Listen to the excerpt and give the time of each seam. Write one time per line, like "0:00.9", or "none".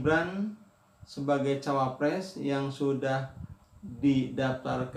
none